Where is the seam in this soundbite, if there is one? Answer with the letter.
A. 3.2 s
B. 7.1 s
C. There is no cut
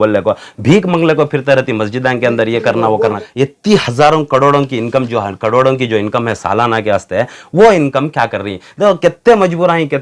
A